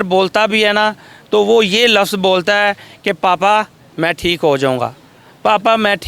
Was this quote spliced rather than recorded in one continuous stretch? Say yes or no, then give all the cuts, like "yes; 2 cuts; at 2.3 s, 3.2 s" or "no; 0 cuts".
no; 0 cuts